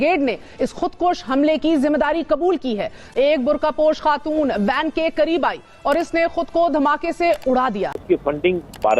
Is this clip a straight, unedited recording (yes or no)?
no